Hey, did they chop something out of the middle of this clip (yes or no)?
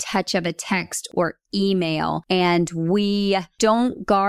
yes